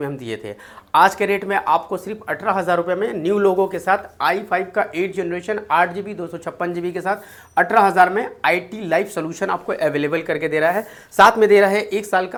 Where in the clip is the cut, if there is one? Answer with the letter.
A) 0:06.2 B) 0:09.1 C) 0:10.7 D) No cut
D